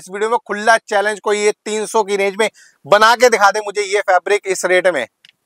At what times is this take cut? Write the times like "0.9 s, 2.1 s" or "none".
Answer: none